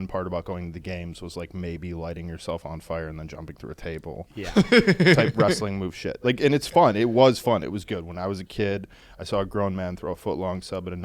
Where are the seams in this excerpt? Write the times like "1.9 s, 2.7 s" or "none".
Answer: none